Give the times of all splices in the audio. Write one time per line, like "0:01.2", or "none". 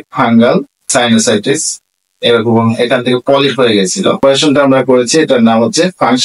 0:04.2